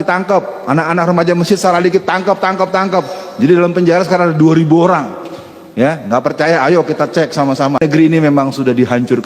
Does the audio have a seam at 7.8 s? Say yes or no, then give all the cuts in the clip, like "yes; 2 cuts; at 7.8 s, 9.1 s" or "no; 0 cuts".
yes; 1 cut; at 7.8 s